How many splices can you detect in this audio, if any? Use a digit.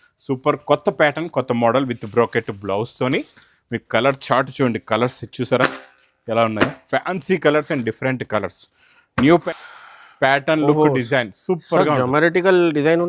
1